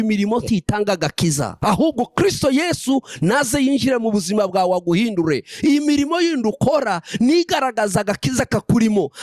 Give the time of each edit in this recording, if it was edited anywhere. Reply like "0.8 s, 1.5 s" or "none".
1.5 s